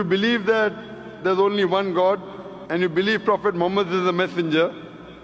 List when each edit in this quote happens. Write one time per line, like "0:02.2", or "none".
none